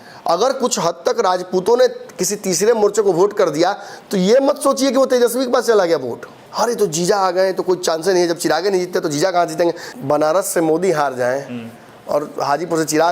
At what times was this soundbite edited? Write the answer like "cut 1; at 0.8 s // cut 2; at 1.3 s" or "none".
cut 1; at 6.4 s // cut 2; at 9.9 s